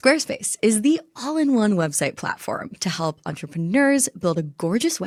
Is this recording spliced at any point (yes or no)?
no